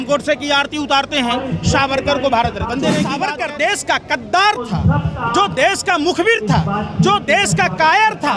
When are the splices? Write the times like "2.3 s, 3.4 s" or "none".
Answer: 3.2 s